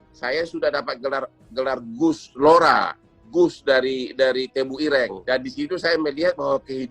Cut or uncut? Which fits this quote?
cut